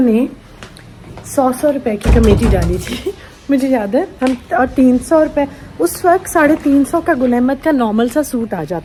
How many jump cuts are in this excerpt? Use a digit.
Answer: 0